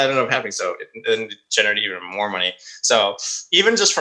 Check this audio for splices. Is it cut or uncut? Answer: uncut